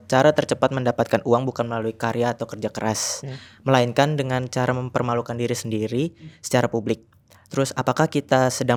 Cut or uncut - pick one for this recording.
uncut